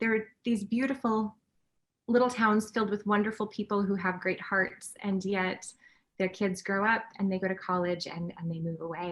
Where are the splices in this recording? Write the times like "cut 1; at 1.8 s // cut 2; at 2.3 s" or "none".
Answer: none